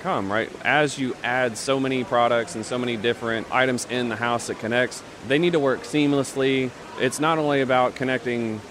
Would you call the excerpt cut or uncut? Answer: cut